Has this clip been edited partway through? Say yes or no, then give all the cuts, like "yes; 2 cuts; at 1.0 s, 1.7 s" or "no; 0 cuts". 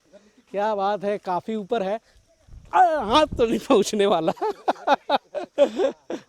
no; 0 cuts